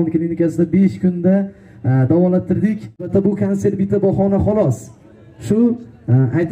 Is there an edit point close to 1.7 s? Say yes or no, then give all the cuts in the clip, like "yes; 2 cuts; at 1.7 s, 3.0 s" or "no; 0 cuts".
no; 1 cut; at 3.1 s